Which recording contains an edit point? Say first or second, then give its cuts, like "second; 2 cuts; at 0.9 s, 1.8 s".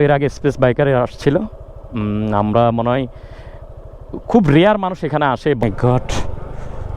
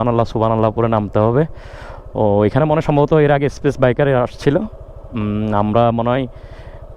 first; 1 cut; at 5.6 s